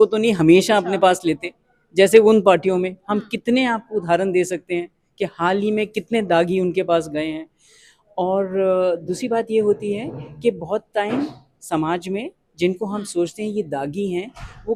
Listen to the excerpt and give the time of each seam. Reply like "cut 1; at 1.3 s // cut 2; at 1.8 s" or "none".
none